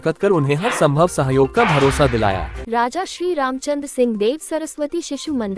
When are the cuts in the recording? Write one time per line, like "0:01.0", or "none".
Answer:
0:02.5